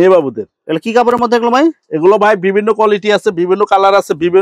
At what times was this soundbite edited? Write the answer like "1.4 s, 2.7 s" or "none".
none